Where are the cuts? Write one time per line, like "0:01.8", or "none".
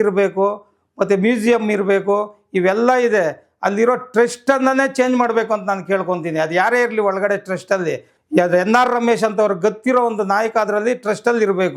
0:08.1